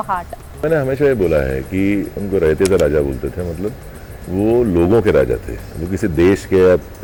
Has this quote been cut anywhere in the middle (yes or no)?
no